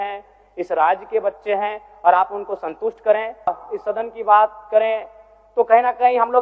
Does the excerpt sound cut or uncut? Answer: cut